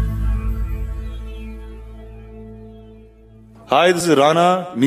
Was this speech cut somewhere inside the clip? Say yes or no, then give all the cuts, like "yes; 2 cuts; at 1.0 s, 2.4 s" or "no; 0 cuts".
yes; 2 cuts; at 2.5 s, 4.0 s